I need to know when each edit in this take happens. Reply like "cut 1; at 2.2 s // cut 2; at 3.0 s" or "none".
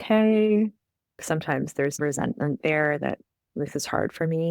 cut 1; at 1.2 s // cut 2; at 2.0 s